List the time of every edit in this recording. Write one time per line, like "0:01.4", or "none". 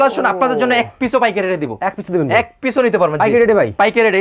none